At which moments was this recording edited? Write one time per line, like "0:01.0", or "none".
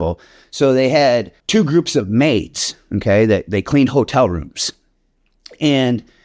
0:01.4